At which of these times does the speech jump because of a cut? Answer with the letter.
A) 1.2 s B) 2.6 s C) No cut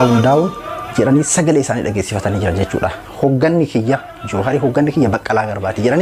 C